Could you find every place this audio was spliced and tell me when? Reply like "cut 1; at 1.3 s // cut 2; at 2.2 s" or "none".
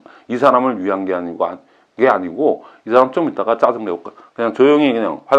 none